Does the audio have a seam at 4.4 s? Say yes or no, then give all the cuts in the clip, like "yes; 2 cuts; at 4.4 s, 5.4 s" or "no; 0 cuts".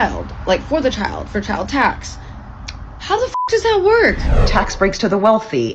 yes; 1 cut; at 4.4 s